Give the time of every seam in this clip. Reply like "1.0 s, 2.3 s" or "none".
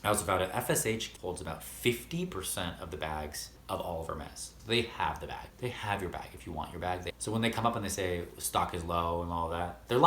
1.1 s, 3.5 s, 4.5 s, 7.1 s